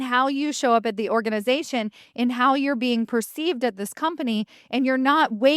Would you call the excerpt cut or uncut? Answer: uncut